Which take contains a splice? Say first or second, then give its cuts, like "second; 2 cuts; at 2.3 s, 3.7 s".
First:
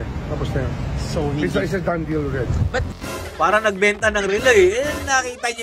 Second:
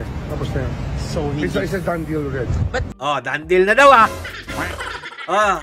first; 1 cut; at 3.0 s